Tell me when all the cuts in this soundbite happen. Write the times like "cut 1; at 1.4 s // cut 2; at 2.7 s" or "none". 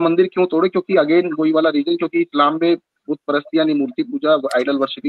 none